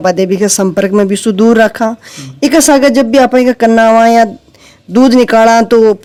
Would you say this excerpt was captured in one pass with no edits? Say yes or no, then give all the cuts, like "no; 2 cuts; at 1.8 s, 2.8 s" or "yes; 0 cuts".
yes; 0 cuts